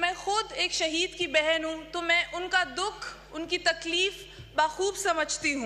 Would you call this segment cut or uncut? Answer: uncut